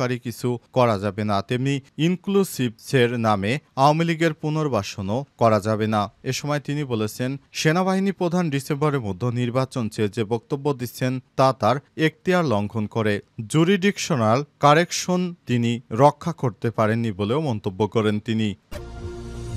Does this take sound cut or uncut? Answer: cut